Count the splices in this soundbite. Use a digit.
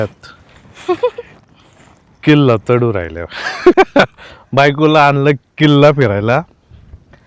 1